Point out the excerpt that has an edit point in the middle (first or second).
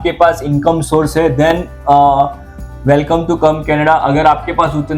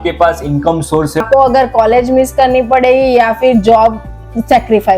second